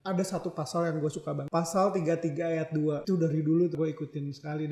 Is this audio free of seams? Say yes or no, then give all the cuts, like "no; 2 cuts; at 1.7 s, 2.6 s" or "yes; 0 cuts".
no; 3 cuts; at 1.4 s, 3.0 s, 3.7 s